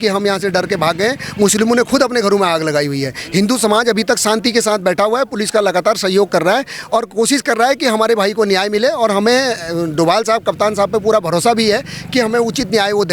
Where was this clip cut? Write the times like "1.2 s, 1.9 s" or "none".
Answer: none